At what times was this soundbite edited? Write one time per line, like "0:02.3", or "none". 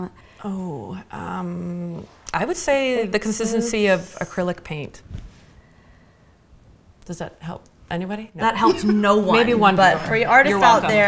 none